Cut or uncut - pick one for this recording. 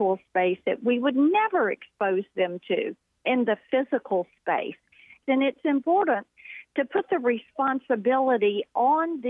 cut